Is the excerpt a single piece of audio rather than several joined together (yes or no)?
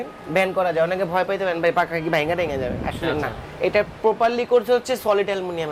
yes